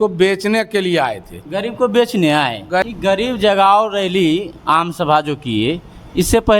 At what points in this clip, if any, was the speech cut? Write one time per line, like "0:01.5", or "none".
0:02.8